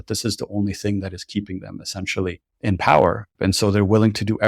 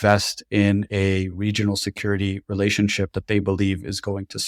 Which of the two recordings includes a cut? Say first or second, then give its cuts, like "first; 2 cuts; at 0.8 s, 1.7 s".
first; 2 cuts; at 2.5 s, 3.3 s